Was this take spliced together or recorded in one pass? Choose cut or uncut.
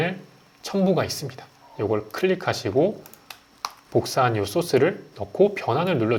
uncut